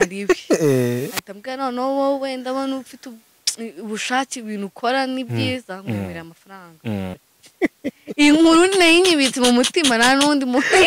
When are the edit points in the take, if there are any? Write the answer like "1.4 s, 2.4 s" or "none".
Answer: 7.1 s